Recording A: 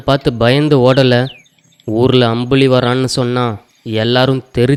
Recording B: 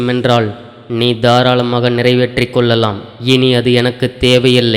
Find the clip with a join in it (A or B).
B